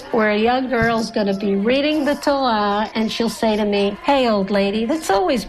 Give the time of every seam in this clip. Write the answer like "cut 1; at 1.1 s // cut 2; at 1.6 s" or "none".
cut 1; at 2.9 s // cut 2; at 4.0 s